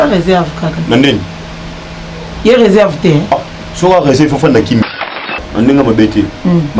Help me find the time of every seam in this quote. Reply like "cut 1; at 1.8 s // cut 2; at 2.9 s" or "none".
cut 1; at 5.4 s

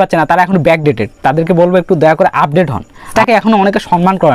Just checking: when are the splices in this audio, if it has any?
cut 1; at 3.1 s

